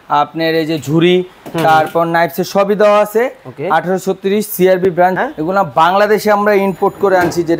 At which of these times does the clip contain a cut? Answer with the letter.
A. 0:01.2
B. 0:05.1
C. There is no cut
B